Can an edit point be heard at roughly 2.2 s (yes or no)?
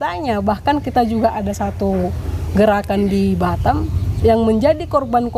no